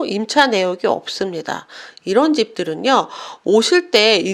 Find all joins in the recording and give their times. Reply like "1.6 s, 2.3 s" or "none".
2.1 s